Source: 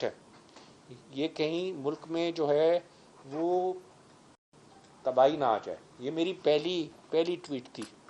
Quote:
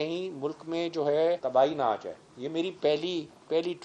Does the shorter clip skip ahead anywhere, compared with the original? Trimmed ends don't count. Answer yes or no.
yes